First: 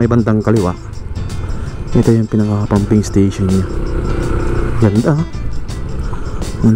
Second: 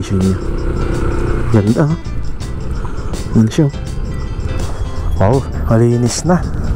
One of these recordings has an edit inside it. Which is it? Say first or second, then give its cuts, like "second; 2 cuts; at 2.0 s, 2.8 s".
second; 1 cut; at 4.5 s